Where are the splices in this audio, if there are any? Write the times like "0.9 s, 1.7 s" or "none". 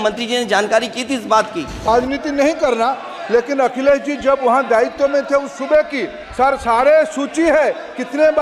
1.9 s